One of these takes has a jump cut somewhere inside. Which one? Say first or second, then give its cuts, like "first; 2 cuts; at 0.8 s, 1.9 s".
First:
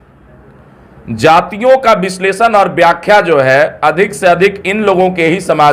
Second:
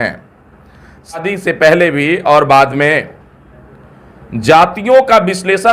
second; 1 cut; at 1.3 s